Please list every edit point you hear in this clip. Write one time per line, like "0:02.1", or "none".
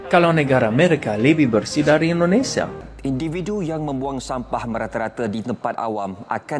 0:02.9